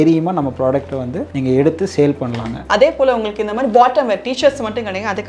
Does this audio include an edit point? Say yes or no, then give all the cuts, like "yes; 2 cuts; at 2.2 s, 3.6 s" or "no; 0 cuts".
yes; 1 cut; at 2.6 s